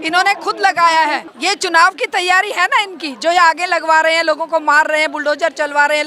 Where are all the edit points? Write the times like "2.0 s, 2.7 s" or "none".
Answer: 1.3 s